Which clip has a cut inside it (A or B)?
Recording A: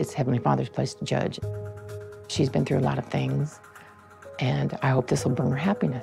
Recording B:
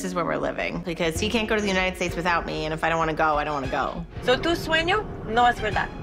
B